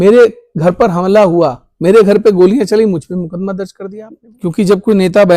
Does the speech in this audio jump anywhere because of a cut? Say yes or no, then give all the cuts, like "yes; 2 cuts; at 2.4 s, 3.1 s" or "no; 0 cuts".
yes; 1 cut; at 3.8 s